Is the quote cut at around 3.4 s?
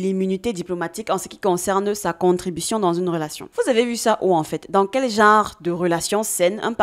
no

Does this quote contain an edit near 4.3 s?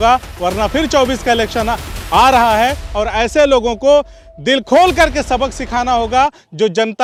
no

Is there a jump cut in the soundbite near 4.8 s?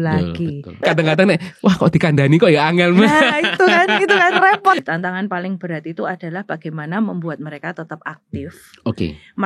yes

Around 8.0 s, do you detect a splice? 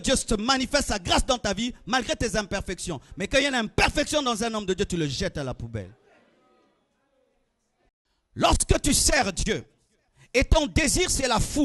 yes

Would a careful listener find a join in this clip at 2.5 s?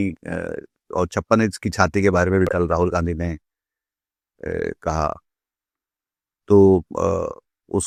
no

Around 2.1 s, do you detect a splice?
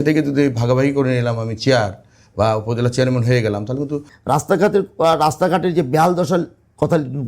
no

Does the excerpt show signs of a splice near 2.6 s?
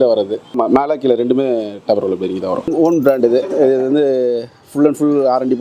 yes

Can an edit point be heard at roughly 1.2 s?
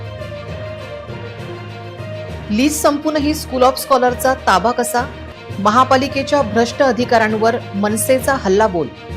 yes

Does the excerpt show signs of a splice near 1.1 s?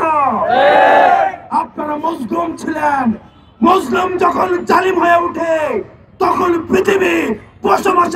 no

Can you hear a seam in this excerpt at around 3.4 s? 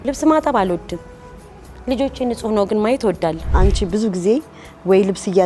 yes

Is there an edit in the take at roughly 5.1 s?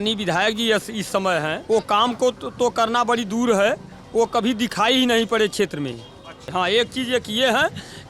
no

